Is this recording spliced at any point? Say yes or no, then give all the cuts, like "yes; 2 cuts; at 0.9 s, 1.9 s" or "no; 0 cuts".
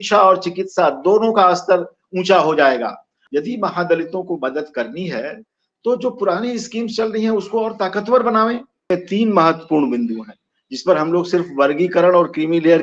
yes; 2 cuts; at 3.1 s, 8.7 s